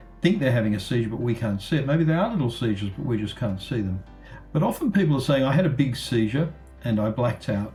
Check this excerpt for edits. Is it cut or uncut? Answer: uncut